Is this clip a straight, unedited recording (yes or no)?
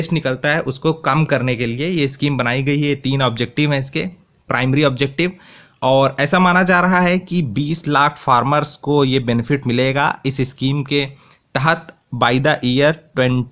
yes